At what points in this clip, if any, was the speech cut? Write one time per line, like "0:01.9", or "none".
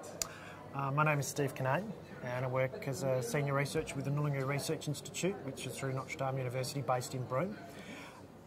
none